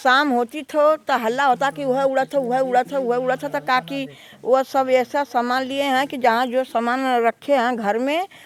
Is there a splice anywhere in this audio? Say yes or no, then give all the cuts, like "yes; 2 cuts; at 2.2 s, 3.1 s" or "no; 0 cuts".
no; 0 cuts